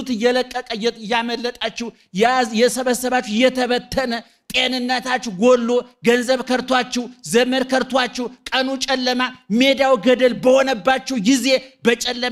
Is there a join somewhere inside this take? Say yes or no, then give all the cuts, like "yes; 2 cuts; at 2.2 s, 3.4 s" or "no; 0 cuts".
no; 0 cuts